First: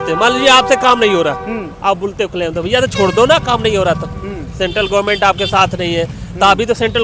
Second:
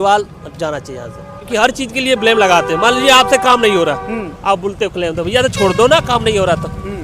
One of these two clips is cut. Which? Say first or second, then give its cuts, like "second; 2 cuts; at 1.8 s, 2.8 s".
second; 1 cut; at 1.5 s